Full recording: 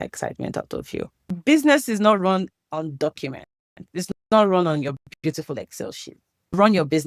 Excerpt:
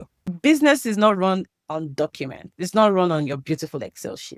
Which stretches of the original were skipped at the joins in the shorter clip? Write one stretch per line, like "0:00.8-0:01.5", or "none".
0:03.6-0:04.2
0:05.0-0:05.2